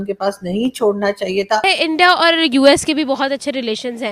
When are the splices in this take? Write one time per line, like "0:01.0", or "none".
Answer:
0:01.6